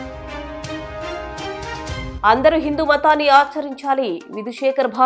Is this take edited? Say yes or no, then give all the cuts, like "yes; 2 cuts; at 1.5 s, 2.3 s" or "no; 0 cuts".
yes; 2 cuts; at 0.7 s, 2.1 s